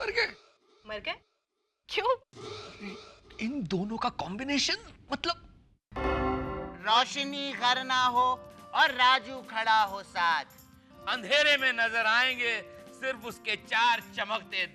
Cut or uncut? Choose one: cut